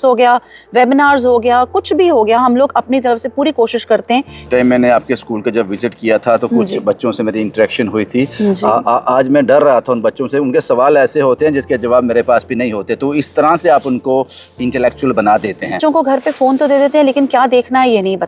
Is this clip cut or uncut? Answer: cut